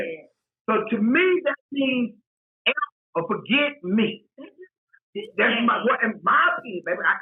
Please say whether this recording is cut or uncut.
uncut